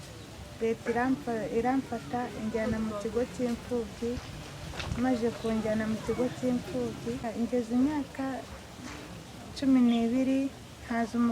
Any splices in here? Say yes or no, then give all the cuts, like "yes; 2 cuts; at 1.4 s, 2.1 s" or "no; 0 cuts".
yes; 1 cut; at 7.3 s